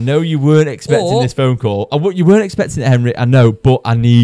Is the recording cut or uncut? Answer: uncut